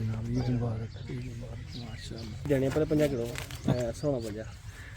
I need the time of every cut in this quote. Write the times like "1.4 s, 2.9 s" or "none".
2.5 s